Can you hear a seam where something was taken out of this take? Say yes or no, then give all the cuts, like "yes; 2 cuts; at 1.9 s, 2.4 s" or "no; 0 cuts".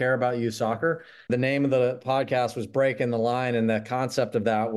yes; 1 cut; at 1.1 s